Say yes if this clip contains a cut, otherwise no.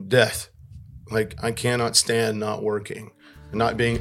no